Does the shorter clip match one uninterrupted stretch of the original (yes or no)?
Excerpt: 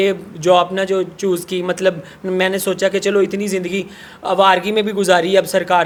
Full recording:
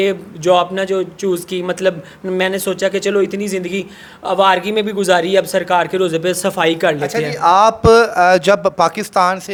yes